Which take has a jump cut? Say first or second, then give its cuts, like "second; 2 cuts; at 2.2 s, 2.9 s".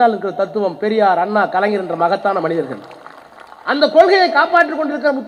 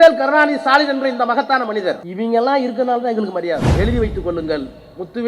second; 2 cuts; at 2.1 s, 3.7 s